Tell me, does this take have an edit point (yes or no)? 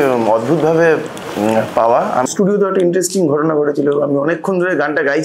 yes